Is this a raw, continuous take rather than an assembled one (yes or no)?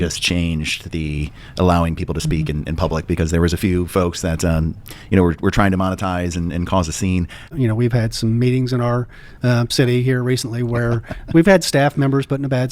no